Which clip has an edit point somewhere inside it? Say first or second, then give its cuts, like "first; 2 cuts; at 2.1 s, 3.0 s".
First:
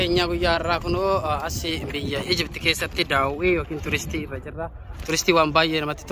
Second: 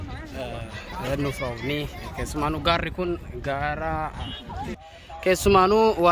second; 1 cut; at 4.9 s